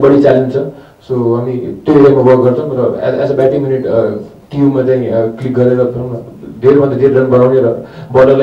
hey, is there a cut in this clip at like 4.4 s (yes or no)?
no